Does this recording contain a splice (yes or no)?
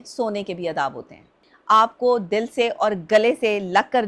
yes